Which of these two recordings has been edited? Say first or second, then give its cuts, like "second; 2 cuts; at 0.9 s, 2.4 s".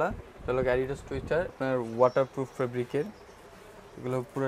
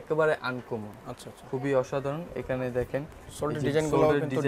first; 1 cut; at 1.5 s